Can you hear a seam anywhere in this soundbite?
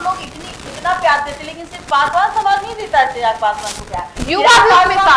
no; 0 cuts

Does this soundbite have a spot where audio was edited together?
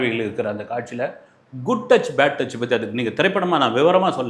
no; 0 cuts

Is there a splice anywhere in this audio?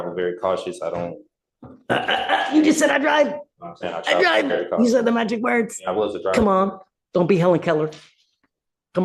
no; 0 cuts

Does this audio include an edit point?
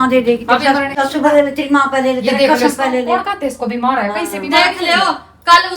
yes; 1 cut; at 1.0 s

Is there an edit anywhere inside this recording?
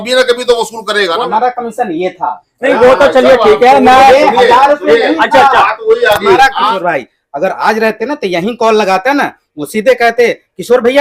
yes; 2 cuts; at 1.2 s, 6.7 s

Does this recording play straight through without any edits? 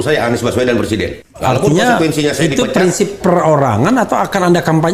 no; 1 cut; at 1.2 s

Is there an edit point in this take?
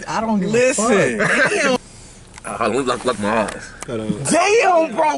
yes; 1 cut; at 1.8 s

